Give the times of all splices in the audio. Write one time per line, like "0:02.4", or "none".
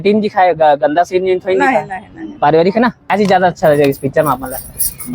0:03.1

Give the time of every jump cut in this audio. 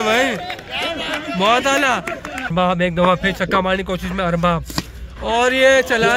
0:02.5

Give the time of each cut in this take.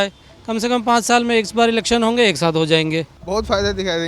0:03.2

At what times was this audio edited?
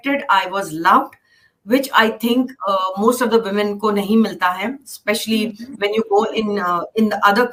none

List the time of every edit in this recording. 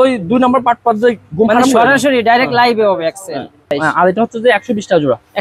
0:03.8

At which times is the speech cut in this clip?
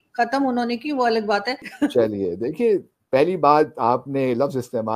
0:01.7

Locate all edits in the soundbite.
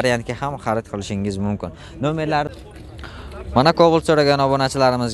0:02.5

